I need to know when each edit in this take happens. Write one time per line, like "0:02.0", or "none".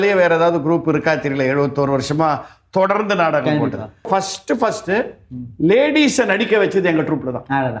0:04.1

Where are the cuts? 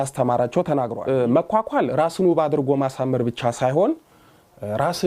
0:01.0

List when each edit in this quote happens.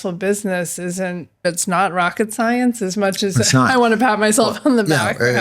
0:01.4

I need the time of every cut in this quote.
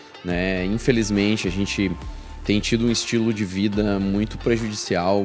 none

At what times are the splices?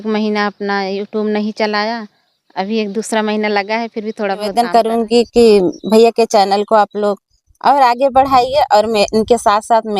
0:04.5

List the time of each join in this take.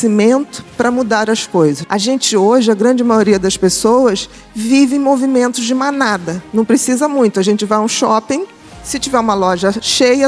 0:01.8
0:06.4

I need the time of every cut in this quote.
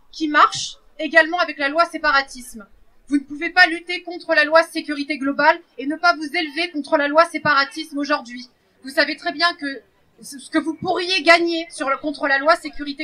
none

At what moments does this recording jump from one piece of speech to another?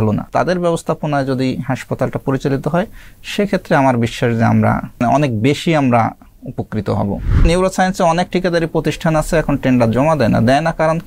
0:07.4

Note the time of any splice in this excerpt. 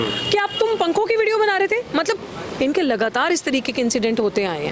0:02.4

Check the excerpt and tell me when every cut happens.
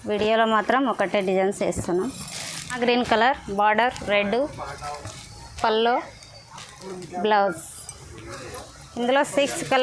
0:02.8

